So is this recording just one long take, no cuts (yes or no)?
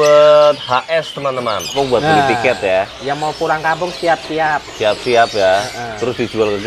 no